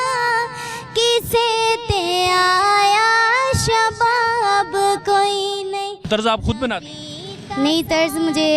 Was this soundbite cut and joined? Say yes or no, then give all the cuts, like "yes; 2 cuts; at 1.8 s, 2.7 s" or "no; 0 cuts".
yes; 1 cut; at 6.1 s